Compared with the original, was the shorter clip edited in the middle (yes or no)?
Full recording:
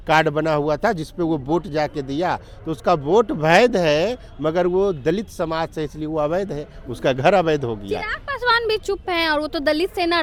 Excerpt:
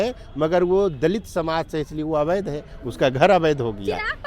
no